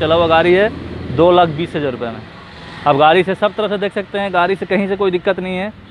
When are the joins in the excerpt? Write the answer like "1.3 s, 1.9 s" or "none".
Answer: none

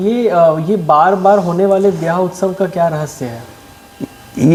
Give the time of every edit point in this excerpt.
none

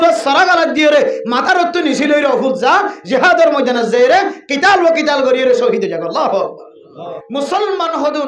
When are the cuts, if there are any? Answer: 7.2 s

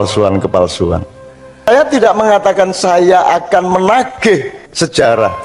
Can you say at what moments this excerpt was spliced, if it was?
1.8 s

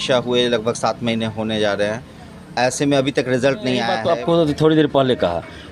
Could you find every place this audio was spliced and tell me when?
3.9 s

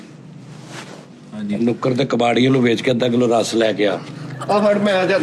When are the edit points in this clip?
none

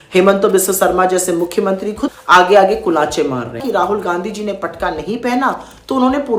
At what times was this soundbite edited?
2.1 s, 3.6 s

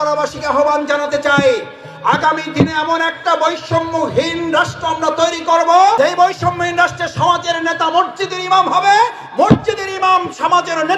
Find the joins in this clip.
6.0 s

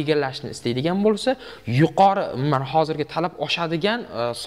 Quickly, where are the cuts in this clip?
none

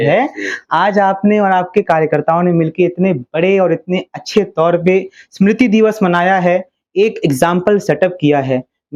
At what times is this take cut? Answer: none

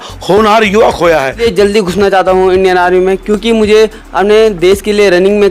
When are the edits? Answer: 1.4 s

